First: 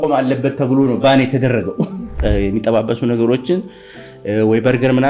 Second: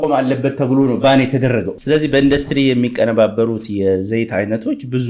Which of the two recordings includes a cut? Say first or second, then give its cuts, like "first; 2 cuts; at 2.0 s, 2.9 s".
first; 1 cut; at 2.1 s